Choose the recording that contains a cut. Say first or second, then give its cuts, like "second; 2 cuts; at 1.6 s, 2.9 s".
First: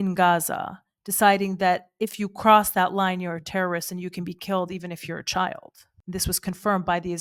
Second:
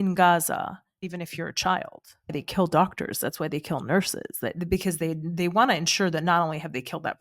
second; 2 cuts; at 1.0 s, 2.3 s